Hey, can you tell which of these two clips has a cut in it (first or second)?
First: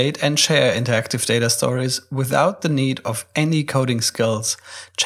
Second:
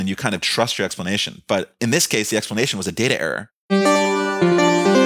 second